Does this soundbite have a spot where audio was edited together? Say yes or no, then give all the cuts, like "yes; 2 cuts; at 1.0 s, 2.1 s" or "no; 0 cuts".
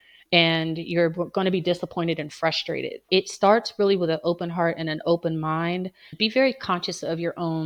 yes; 1 cut; at 6.0 s